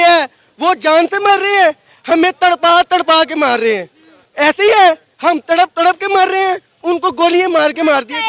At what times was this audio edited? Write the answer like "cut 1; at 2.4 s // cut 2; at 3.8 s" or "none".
none